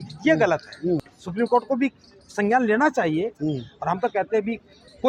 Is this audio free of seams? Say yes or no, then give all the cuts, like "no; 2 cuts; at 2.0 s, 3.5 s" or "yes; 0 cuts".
no; 1 cut; at 1.2 s